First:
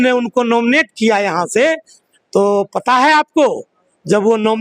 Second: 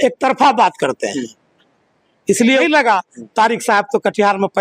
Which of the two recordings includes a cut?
second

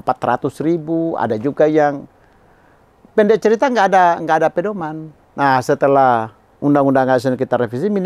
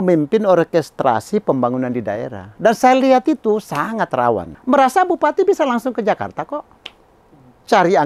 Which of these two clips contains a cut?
second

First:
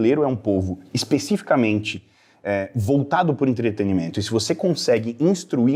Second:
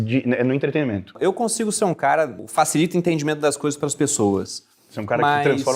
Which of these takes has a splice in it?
second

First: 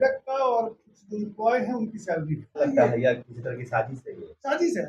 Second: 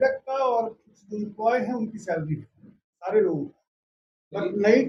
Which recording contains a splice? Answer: first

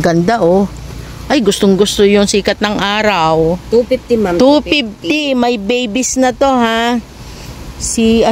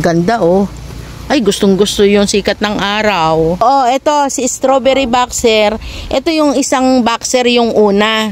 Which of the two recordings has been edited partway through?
second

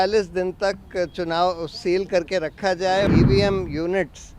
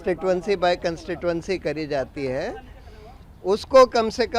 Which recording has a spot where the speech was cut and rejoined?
first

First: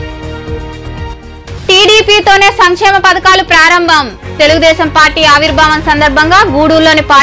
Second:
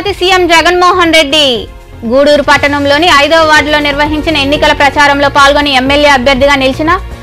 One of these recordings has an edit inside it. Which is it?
first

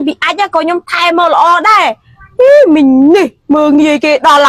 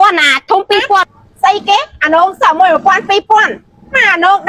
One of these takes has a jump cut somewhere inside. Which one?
second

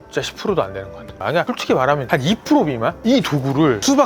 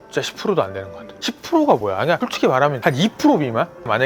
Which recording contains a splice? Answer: first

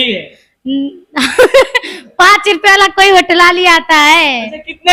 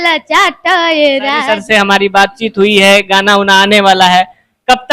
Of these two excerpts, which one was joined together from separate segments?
second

